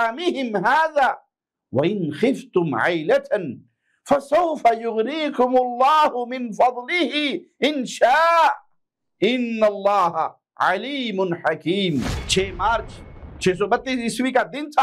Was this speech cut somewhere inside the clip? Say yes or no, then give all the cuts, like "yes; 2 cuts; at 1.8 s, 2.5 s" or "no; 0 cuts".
yes; 1 cut; at 12.2 s